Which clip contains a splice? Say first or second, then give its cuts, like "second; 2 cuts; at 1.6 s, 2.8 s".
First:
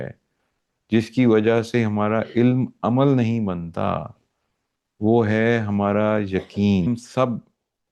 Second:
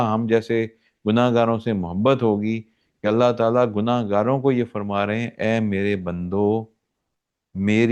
first; 1 cut; at 6.9 s